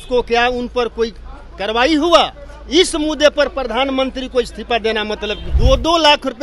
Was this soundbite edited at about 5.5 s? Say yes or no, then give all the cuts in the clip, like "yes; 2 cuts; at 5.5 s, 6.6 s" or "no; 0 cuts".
yes; 1 cut; at 5.5 s